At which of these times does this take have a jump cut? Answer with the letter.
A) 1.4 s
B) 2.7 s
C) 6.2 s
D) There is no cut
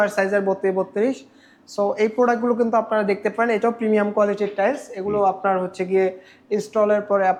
D